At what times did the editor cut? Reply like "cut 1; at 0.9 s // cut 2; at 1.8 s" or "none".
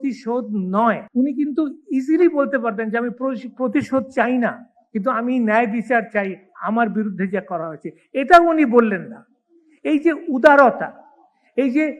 cut 1; at 1.0 s